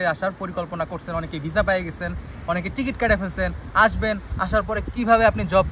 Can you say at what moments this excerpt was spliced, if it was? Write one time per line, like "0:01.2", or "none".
none